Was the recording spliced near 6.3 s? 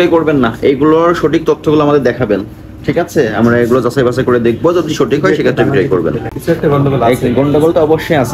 yes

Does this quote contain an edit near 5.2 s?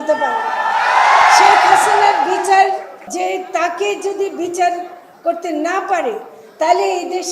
no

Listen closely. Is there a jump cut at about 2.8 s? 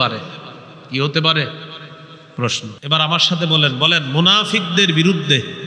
yes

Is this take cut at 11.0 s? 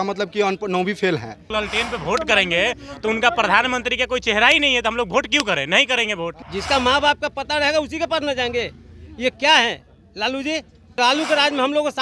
yes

